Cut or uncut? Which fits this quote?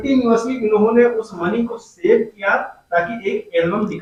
uncut